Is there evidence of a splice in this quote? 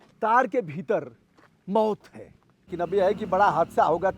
yes; 1 cut; at 2.6 s

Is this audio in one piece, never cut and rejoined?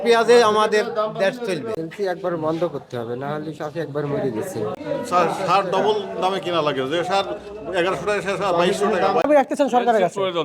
no; 3 cuts; at 1.8 s, 4.8 s, 9.3 s

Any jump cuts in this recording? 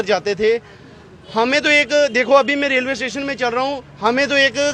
no; 0 cuts

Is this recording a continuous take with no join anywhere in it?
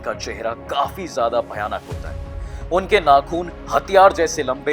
yes; 0 cuts

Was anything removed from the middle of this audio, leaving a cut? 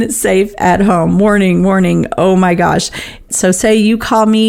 yes; 1 cut; at 3.3 s

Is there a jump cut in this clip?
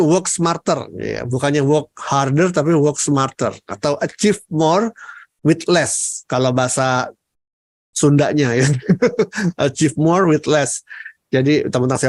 no; 0 cuts

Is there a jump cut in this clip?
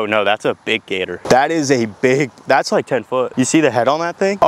no; 0 cuts

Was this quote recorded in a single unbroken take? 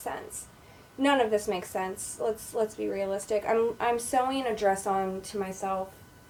yes; 0 cuts

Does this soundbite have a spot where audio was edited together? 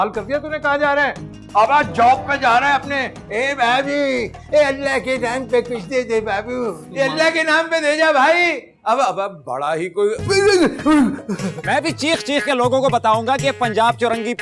yes; 2 cuts; at 6.9 s, 11.6 s

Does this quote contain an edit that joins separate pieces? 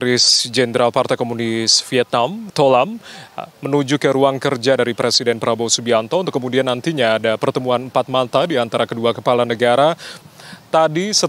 yes; 2 cuts; at 2.4 s, 10.2 s

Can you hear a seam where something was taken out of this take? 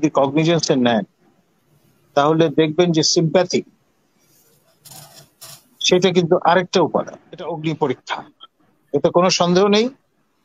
yes; 1 cut; at 7.5 s

